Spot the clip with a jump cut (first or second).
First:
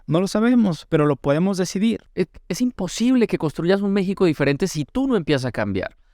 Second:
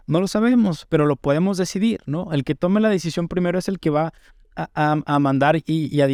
first